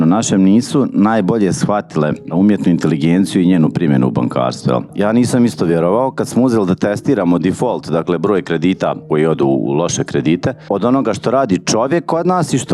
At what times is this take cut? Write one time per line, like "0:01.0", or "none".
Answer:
0:02.3
0:04.9